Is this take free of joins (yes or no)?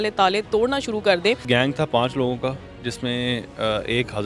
no